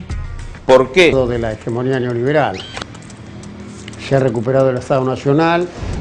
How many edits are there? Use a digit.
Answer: 0